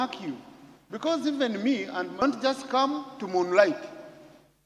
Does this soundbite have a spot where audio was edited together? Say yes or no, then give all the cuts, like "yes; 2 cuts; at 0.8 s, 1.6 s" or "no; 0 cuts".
yes; 1 cut; at 2.2 s